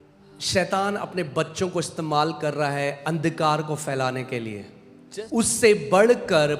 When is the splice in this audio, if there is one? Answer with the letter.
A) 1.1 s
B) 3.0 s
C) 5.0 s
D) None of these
C